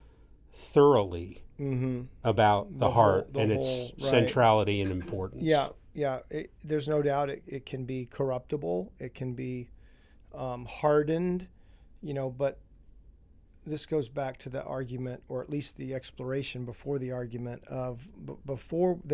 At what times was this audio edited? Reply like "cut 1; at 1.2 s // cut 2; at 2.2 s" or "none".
none